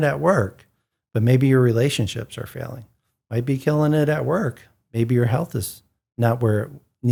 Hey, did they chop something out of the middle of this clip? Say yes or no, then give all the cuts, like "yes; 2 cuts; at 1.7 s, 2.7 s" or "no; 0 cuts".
no; 0 cuts